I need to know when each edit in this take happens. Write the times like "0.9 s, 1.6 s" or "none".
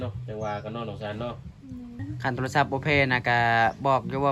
2.0 s